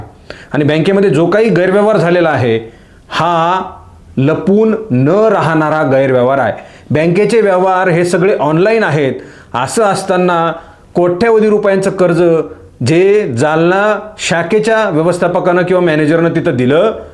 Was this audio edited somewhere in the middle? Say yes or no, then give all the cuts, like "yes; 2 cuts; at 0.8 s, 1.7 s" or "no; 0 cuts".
no; 0 cuts